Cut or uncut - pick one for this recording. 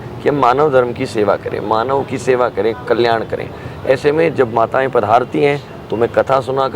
uncut